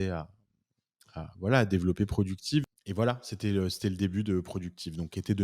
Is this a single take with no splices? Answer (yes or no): no